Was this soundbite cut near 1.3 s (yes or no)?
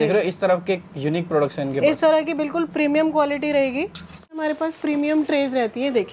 no